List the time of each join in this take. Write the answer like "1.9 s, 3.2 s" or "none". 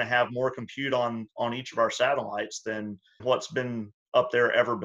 3.2 s